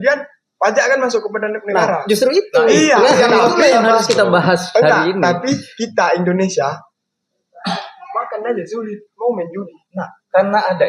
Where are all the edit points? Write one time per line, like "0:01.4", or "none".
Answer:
none